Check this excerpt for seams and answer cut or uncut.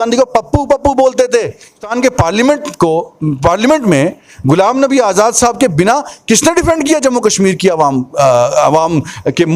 cut